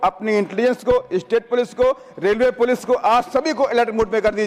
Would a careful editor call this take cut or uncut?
uncut